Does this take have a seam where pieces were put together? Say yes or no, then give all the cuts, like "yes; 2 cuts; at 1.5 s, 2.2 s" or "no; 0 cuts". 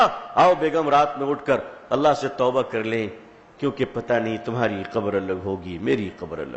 no; 0 cuts